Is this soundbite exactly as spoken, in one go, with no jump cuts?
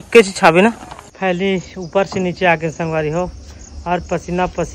no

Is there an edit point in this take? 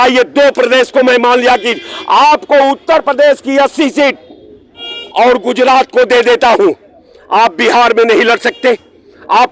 no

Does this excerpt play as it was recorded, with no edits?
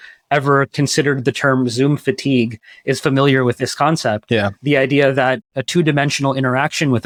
yes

